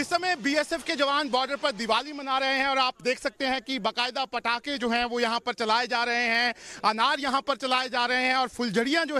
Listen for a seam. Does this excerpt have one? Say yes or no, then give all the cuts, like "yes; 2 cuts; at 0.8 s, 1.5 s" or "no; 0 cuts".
no; 0 cuts